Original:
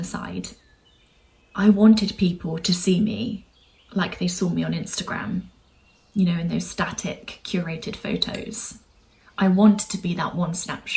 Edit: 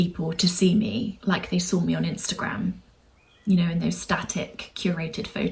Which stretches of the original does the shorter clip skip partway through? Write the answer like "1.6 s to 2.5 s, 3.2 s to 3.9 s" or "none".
3.4 s to 3.8 s